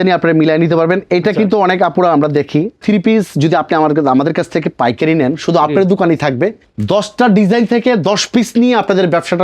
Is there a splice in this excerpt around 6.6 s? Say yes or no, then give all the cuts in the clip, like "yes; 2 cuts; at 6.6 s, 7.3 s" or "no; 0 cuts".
yes; 2 cuts; at 2.8 s, 6.6 s